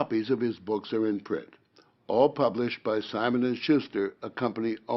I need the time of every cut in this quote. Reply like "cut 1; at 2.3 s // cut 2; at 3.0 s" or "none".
none